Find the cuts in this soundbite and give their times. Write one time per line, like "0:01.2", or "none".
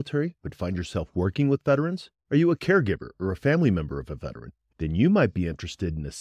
none